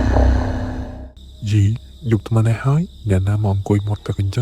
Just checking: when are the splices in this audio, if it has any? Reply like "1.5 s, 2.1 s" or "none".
0.9 s